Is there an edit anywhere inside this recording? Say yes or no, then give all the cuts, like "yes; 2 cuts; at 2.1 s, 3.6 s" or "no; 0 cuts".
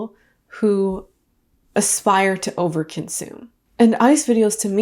yes; 1 cut; at 3.7 s